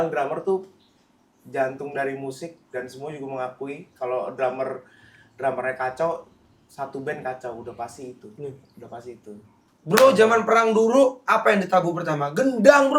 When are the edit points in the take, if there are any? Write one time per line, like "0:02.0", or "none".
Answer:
0:09.7